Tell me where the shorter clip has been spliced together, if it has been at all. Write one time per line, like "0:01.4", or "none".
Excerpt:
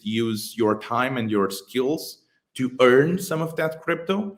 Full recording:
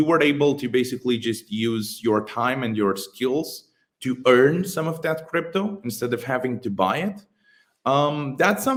none

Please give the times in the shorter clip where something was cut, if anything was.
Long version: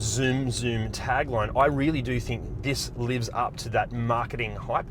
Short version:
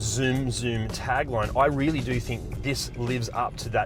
none

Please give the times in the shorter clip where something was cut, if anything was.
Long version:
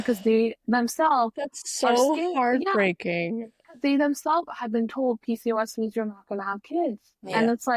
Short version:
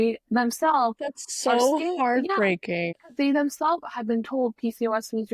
0:03.0

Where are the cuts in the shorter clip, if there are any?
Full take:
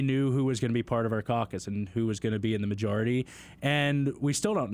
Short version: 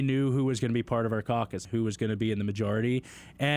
0:01.7

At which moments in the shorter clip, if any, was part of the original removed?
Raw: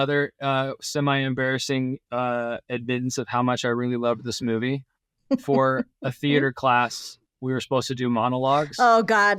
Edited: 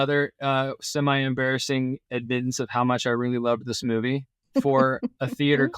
0:02.0
0:04.6

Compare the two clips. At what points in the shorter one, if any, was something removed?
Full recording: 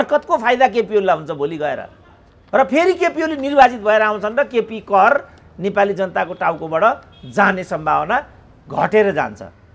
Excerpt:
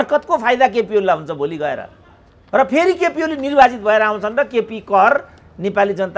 none

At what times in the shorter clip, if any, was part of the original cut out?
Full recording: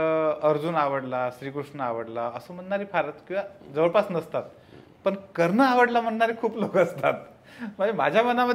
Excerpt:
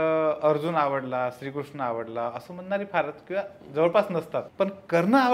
0:04.4

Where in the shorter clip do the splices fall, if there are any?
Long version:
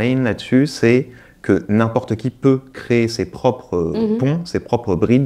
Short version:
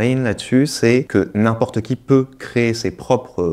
0:01.1

